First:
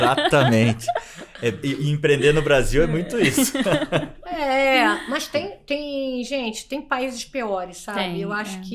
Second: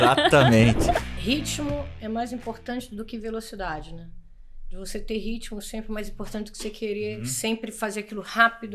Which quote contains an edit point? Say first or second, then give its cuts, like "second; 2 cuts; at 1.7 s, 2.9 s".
second; 2 cuts; at 1.1 s, 7.3 s